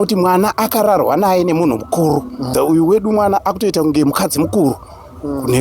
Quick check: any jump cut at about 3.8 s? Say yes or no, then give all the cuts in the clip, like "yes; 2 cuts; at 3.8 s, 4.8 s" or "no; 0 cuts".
no; 1 cut; at 2.5 s